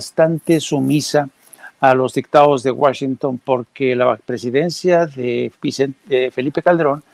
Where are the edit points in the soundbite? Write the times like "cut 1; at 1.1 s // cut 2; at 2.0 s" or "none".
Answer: none